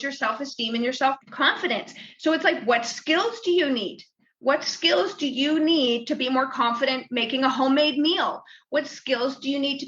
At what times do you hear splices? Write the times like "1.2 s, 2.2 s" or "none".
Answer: 1.3 s